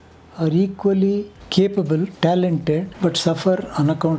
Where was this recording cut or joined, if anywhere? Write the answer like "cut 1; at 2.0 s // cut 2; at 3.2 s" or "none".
cut 1; at 1.4 s // cut 2; at 2.1 s // cut 3; at 2.9 s